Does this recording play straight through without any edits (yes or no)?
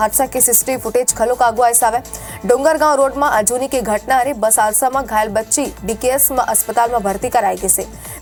yes